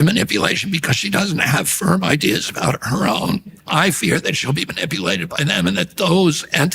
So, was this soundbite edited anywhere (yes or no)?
yes